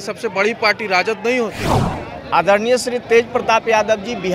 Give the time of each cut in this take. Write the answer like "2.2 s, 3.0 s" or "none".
1.9 s